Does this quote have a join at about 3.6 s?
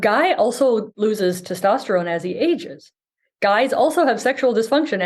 no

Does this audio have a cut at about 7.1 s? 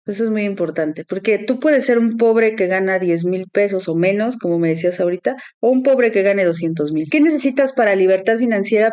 yes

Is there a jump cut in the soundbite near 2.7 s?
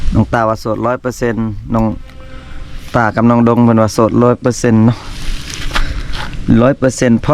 no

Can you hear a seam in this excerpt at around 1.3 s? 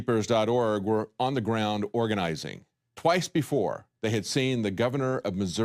no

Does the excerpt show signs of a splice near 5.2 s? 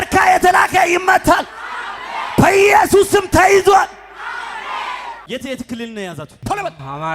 yes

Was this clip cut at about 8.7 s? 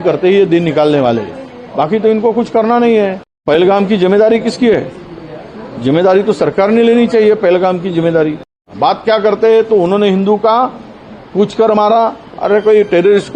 yes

